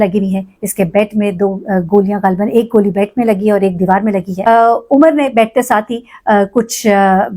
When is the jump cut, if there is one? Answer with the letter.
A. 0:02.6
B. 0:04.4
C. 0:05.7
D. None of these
B